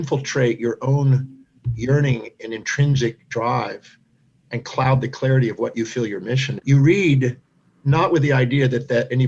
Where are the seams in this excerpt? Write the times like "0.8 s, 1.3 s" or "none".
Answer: 6.5 s